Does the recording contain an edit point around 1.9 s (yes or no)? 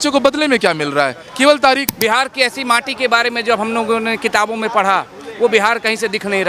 yes